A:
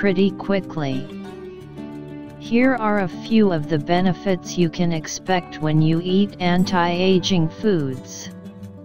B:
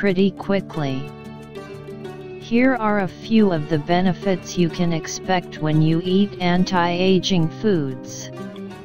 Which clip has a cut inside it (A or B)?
A